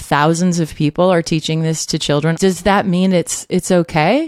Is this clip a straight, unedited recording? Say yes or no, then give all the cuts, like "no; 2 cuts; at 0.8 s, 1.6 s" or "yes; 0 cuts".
no; 2 cuts; at 2.4 s, 3.4 s